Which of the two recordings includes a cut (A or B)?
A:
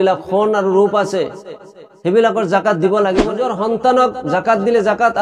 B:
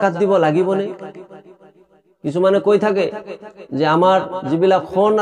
A